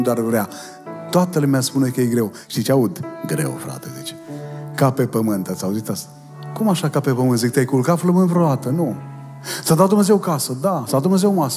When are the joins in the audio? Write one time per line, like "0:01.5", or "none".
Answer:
0:02.4
0:06.4